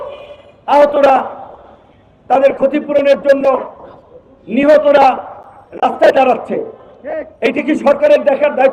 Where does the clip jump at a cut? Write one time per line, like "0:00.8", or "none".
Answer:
none